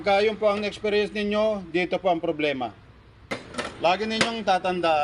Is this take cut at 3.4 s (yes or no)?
yes